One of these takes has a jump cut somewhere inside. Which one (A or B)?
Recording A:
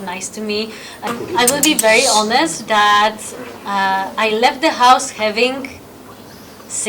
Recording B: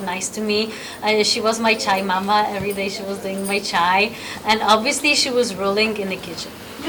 A